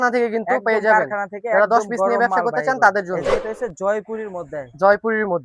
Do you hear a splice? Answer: yes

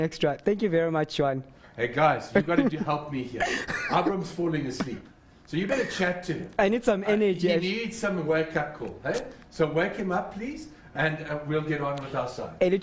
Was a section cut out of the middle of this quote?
no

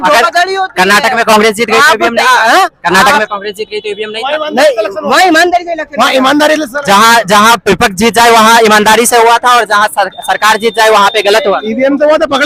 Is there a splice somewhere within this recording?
no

